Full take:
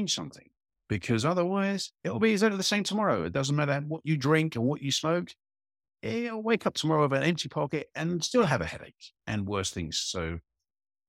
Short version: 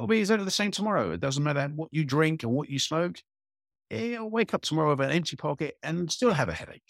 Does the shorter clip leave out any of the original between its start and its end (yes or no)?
no